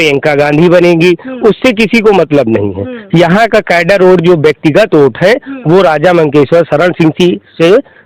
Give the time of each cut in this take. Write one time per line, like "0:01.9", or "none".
none